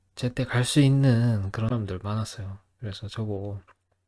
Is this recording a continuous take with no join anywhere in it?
no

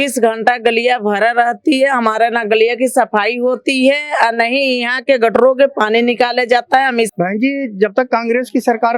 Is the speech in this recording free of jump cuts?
no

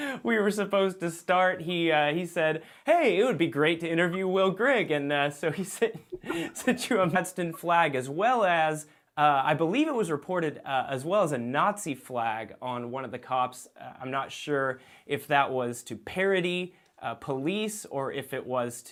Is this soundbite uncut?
yes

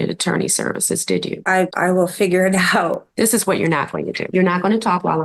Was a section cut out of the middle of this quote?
yes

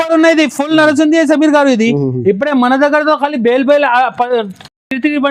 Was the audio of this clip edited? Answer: no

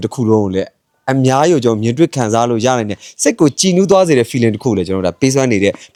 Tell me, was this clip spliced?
no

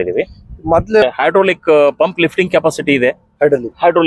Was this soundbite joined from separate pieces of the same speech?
yes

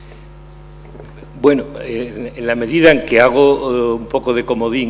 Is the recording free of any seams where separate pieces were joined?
yes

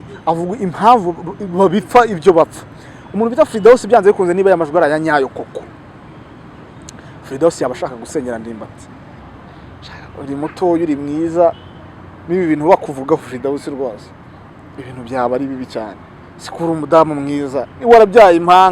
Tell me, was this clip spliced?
yes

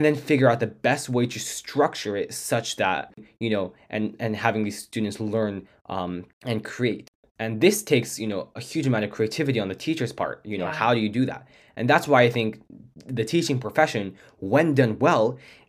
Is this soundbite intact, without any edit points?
no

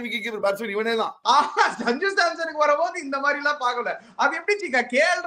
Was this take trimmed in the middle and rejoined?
yes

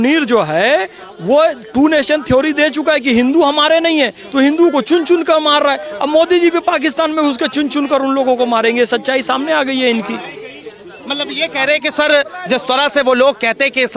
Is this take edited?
no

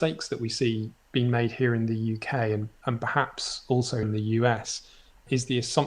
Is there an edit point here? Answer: yes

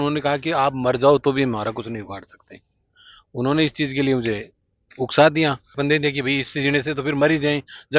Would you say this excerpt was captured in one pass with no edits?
no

